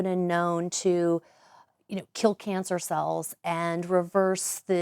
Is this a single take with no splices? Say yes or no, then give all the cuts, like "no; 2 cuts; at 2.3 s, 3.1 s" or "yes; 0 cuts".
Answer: yes; 0 cuts